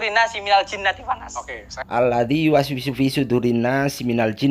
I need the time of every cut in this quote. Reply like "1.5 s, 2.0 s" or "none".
1.3 s

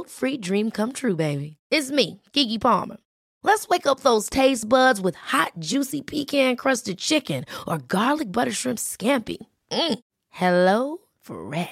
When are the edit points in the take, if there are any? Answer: none

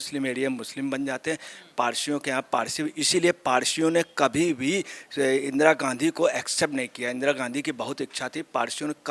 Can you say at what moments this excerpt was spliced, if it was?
none

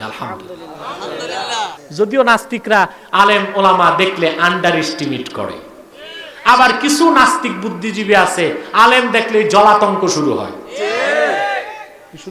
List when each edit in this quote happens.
1.8 s

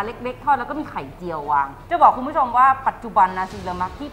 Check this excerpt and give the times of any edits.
none

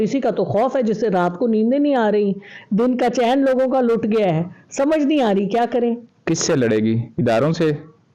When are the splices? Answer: none

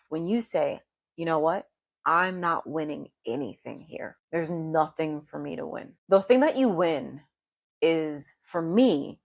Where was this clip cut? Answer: 4.2 s, 5.9 s

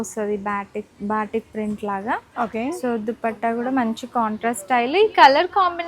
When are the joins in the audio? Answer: none

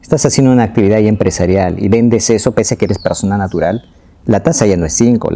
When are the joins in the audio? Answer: none

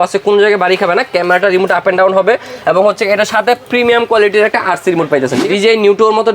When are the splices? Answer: 5.5 s

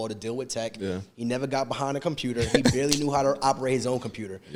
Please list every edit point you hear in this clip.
none

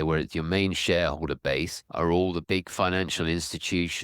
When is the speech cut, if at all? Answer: 1.8 s, 2.4 s

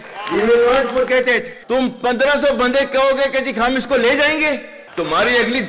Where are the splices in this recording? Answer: 1.5 s, 4.8 s

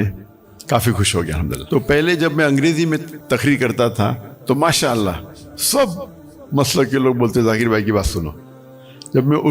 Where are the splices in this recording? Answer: 1.6 s, 3.1 s

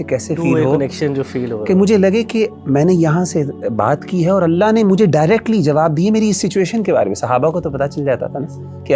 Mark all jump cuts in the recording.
none

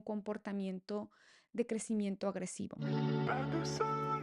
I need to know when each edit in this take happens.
2.7 s

